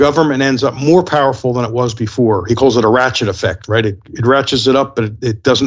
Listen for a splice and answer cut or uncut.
uncut